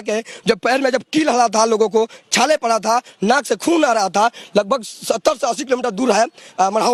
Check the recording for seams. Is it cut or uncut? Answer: uncut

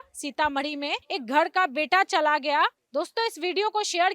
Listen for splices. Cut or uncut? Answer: cut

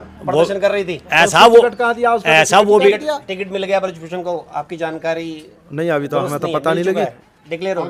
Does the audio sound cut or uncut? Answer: uncut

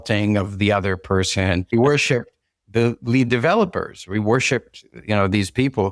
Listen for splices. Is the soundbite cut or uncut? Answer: cut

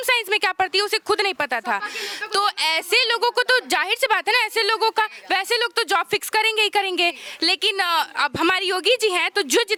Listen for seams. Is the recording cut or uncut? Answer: uncut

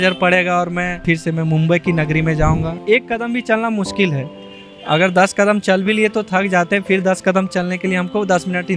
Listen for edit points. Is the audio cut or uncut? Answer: cut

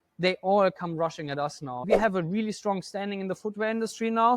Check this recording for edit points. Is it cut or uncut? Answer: cut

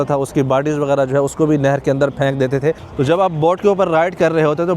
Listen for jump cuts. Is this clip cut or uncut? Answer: cut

